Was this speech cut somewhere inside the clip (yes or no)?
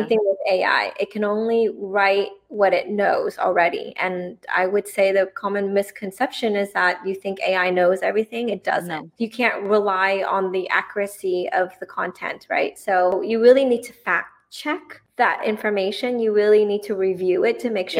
yes